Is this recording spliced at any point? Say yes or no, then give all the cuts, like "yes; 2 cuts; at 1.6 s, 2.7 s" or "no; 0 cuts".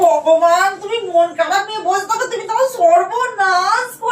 no; 0 cuts